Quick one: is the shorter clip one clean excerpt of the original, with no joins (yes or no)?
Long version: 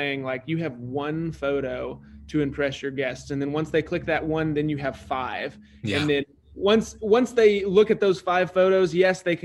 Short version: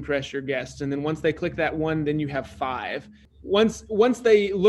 no